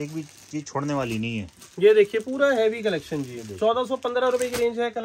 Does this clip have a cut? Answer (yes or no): no